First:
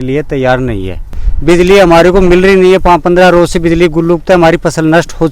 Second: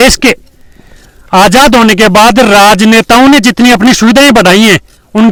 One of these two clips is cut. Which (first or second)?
first